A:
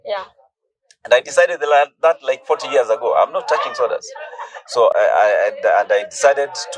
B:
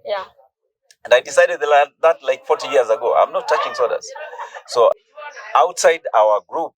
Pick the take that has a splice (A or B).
B